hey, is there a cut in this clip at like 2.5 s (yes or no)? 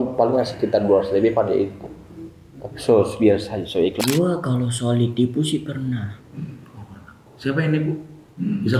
no